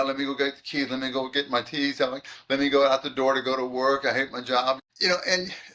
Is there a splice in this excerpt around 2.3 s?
no; 1 cut; at 4.8 s

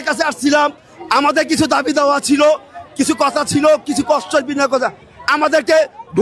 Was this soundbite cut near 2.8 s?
no; 0 cuts

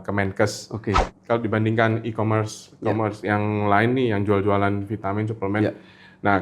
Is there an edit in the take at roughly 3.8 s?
no; 1 cut; at 1.1 s

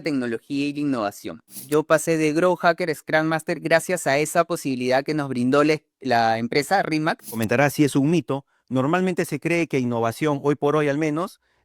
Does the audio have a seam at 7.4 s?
yes; 2 cuts; at 1.7 s, 7.4 s

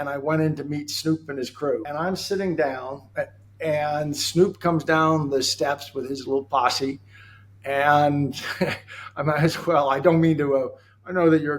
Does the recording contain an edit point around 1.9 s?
yes; 1 cut; at 1.9 s

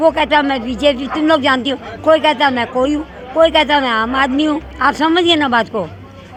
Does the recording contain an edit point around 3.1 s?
no; 0 cuts

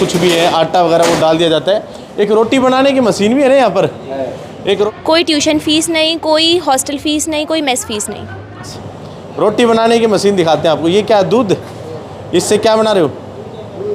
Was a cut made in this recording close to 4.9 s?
yes; 2 cuts; at 4.9 s, 8.7 s

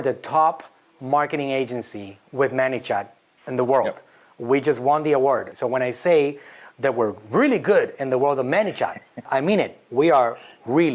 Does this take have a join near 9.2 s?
yes; 2 cuts; at 5.5 s, 9.2 s

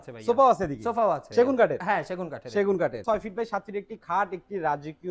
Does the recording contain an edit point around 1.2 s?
yes; 2 cuts; at 1.2 s, 3.0 s

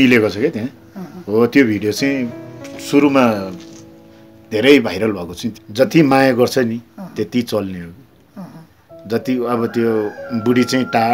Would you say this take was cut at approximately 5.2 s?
yes; 1 cut; at 5.2 s

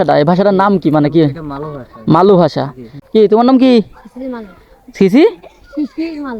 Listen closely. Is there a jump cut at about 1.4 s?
no; 1 cut; at 2.9 s

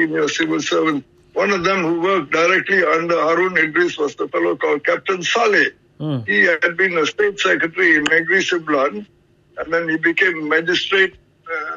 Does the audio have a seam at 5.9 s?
no; 0 cuts

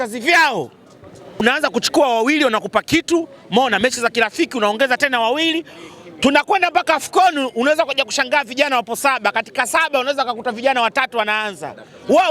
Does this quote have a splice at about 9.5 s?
no; 1 cut; at 1.4 s

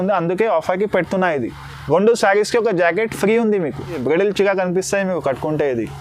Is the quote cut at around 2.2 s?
no; 1 cut; at 3.9 s

